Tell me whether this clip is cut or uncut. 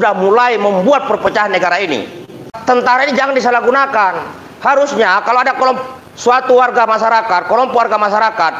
cut